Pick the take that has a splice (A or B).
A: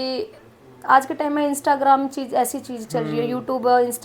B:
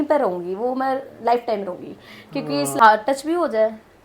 B